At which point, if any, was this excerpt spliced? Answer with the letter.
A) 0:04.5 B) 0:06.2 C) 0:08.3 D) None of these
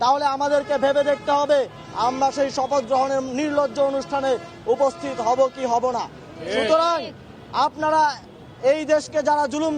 B